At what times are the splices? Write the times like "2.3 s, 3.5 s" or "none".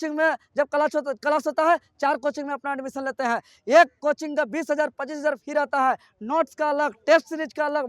none